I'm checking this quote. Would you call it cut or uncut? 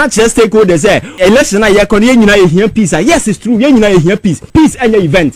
cut